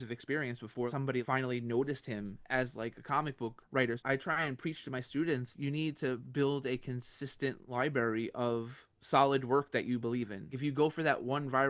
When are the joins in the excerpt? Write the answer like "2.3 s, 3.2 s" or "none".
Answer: 1.1 s, 4.0 s, 5.5 s, 10.5 s

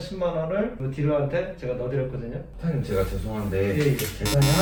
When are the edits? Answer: none

